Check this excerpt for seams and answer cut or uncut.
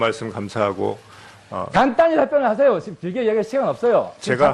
uncut